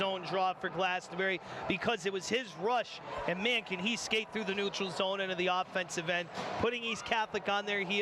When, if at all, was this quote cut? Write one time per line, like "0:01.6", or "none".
none